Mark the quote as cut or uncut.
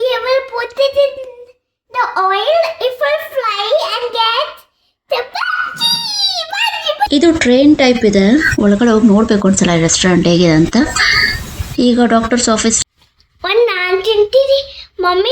cut